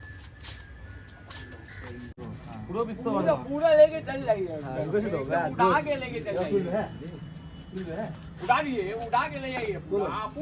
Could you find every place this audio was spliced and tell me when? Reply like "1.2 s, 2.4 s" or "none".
2.2 s